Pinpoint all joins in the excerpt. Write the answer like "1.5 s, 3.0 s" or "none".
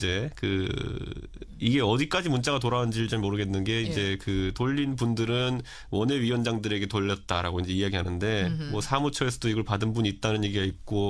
8.9 s